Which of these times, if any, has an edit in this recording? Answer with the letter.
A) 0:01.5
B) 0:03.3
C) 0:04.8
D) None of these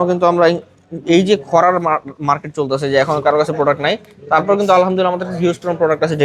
D